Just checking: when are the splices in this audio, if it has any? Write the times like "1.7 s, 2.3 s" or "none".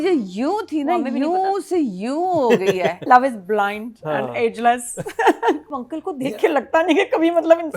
3.1 s, 5.7 s